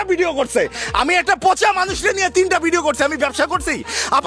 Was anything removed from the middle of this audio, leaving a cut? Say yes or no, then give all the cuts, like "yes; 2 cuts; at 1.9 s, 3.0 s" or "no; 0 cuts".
no; 0 cuts